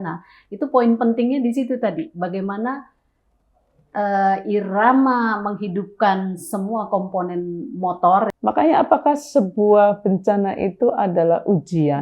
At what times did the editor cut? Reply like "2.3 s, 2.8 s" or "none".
8.3 s

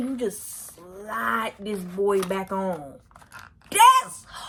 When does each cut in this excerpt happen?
none

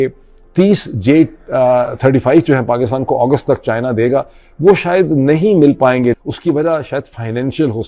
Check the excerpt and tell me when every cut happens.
6.2 s

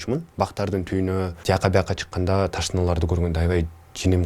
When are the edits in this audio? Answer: 1.4 s

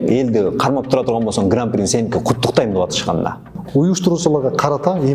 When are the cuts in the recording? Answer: 3.5 s

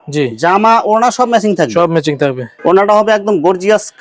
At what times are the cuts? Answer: 2.5 s

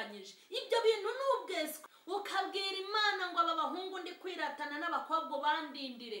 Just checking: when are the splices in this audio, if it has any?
1.8 s

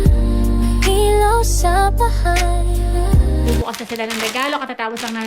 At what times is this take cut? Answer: 3.7 s

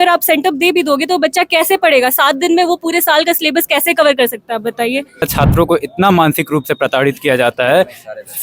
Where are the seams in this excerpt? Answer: 5.3 s

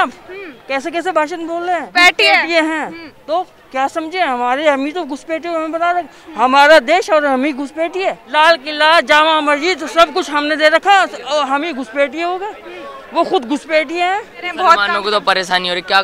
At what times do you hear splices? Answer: 1.9 s, 8.2 s, 14.5 s

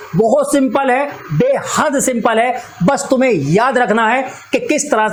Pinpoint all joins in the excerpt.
none

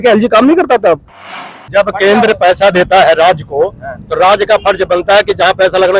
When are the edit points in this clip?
1.4 s

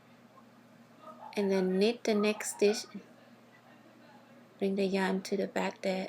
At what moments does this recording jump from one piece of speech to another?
1.3 s

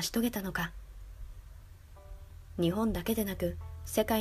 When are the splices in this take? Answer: 2.8 s

